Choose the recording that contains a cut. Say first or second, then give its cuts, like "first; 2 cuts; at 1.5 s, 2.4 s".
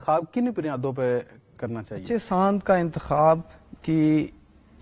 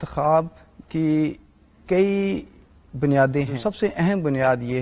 second; 1 cut; at 3.5 s